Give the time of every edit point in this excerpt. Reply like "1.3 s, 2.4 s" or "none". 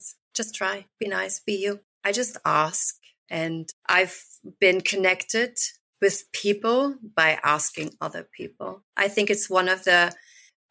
1.9 s, 3.5 s, 8.8 s